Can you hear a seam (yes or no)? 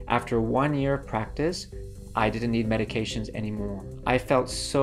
yes